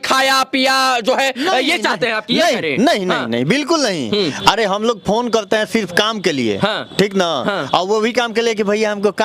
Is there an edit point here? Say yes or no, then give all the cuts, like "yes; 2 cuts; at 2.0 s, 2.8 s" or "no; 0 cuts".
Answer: no; 0 cuts